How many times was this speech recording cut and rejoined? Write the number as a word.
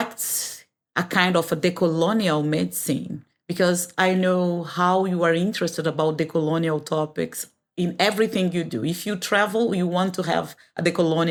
zero